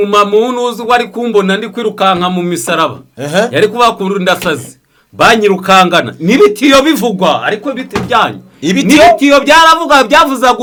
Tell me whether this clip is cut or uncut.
uncut